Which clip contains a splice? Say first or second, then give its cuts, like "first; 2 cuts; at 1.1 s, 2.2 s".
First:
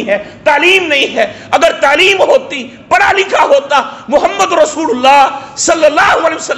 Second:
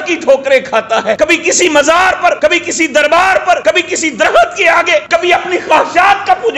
second; 4 cuts; at 1.2 s, 2.4 s, 3.6 s, 5.1 s